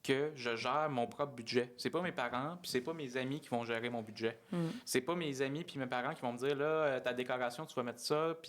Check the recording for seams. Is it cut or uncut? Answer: uncut